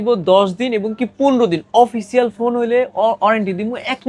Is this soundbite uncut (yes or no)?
yes